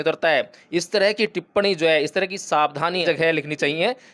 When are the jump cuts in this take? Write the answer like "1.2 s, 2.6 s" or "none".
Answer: 3.0 s